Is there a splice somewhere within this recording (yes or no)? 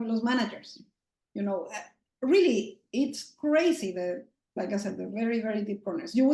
no